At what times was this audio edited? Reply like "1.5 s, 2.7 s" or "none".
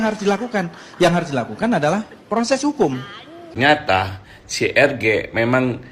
3.7 s